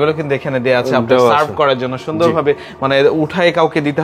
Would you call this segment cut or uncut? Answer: uncut